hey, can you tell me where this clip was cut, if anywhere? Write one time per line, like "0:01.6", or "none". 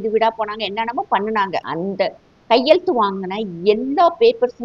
0:01.7